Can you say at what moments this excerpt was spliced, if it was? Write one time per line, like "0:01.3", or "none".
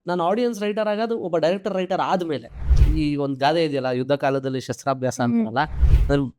0:02.8